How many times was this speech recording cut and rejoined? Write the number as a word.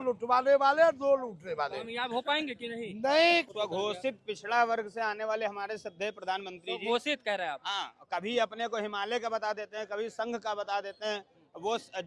one